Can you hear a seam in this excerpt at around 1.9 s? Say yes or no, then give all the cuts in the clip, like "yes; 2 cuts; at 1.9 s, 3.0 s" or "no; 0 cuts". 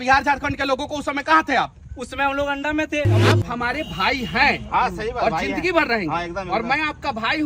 no; 1 cut; at 3.2 s